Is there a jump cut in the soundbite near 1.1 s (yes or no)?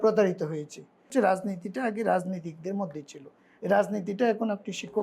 yes